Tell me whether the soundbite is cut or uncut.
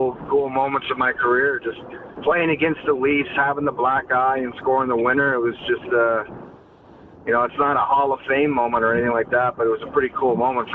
uncut